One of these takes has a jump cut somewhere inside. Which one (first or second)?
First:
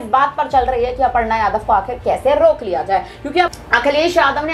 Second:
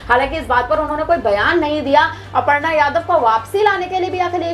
first